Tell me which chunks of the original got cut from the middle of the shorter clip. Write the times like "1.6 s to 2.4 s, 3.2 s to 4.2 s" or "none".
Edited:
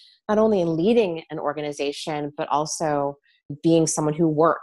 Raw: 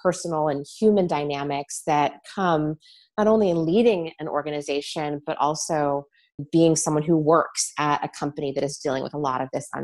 none